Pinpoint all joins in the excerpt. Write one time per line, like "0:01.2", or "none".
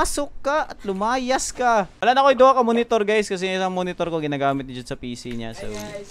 0:01.9